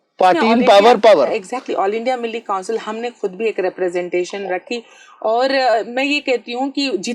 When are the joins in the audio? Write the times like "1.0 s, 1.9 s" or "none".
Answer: none